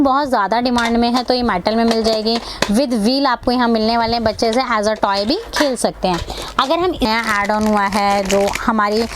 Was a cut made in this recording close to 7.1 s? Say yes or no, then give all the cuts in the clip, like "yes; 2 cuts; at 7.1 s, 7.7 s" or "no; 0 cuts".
yes; 1 cut; at 7.1 s